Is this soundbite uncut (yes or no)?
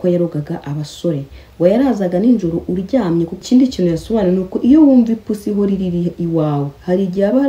no